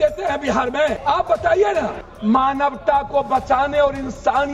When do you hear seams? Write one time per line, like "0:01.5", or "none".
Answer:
0:01.0
0:02.0

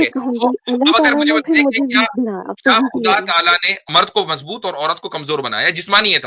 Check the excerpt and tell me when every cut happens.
0:03.9

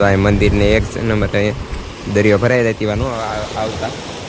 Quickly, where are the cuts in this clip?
none

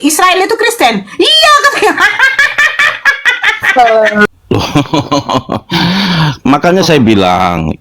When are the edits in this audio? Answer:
0:04.3

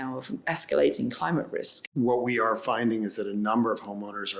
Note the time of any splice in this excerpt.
0:01.8

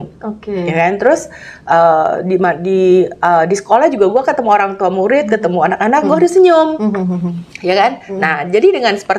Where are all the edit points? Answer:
none

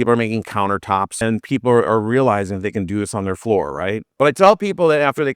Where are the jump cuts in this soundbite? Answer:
0:01.2
0:04.0

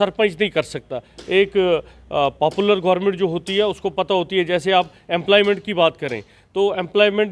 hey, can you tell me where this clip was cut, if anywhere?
none

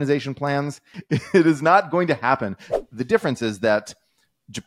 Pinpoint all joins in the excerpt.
0:00.9
0:02.6

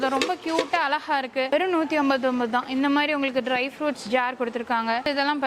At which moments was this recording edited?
0:01.5

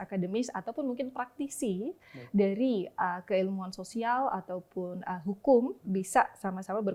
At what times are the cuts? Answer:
none

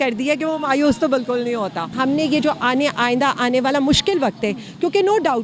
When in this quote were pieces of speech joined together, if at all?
0:02.0

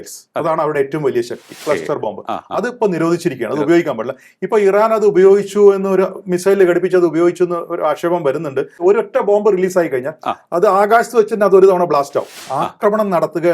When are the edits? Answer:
0:01.6
0:08.8
0:12.4

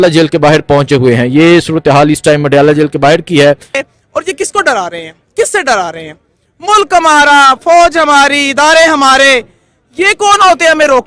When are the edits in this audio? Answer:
0:03.8

